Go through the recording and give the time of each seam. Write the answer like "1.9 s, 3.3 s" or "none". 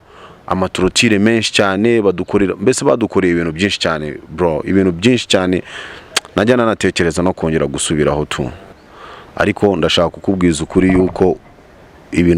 8.7 s